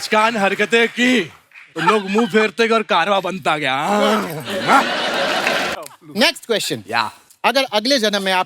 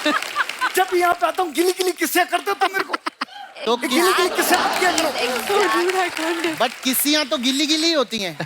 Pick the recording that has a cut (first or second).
first